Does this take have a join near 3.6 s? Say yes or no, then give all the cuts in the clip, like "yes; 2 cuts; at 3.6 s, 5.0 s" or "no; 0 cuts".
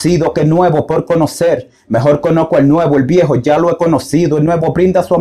no; 0 cuts